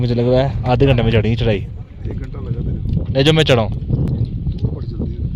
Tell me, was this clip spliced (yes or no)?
no